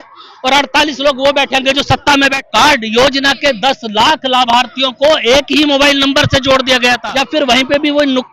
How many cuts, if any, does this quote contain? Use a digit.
2